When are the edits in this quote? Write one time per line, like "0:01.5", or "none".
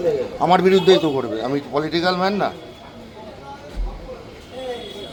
none